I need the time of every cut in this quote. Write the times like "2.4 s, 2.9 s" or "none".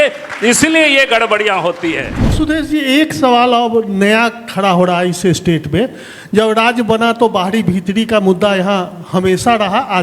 2.3 s